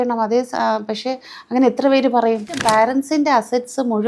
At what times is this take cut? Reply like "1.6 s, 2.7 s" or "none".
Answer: 2.5 s